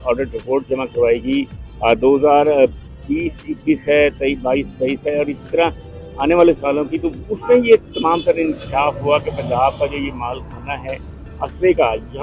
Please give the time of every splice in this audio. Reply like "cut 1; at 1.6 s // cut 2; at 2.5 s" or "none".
none